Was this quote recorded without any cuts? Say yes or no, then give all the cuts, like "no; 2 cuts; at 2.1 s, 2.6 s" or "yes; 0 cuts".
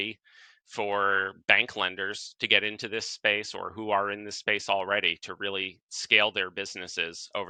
yes; 0 cuts